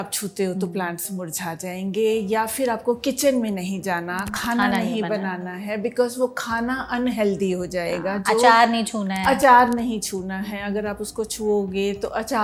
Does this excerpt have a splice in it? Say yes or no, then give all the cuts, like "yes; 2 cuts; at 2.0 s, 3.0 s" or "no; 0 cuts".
no; 0 cuts